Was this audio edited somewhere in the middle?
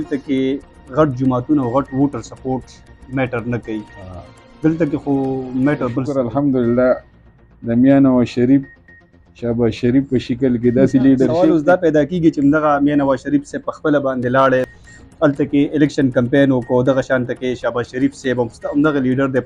yes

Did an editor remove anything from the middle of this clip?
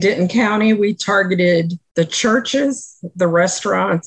yes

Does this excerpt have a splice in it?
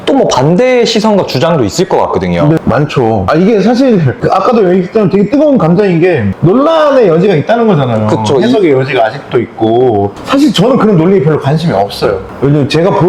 yes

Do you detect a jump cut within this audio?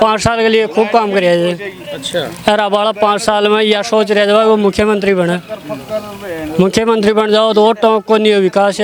no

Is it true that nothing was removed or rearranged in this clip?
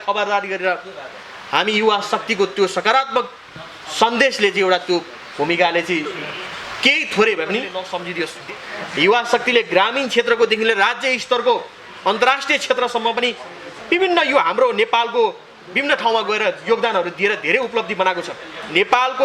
no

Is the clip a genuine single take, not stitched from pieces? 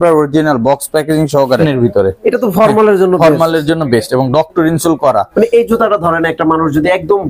no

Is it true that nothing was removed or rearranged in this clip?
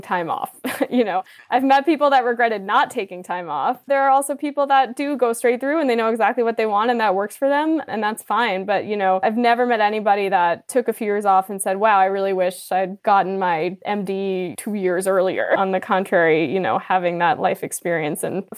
no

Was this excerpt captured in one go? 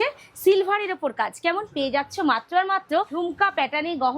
no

